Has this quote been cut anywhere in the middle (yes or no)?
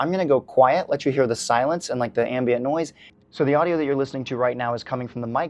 yes